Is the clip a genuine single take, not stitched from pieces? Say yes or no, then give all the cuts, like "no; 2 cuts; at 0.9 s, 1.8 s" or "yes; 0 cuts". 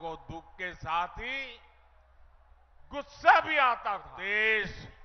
no; 1 cut; at 4.1 s